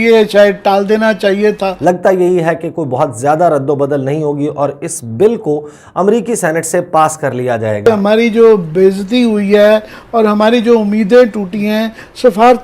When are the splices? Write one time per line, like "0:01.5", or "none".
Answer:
0:01.8
0:07.9